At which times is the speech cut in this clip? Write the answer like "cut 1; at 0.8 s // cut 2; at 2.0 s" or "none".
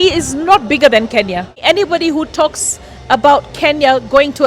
cut 1; at 1.5 s